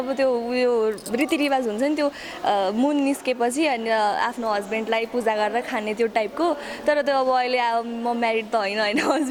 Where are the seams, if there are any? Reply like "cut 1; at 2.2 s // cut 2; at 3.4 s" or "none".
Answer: none